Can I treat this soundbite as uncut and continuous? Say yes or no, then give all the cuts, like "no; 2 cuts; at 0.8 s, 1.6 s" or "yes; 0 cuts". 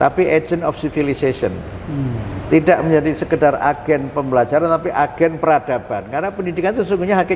yes; 0 cuts